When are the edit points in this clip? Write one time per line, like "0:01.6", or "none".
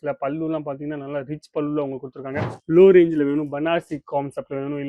0:02.5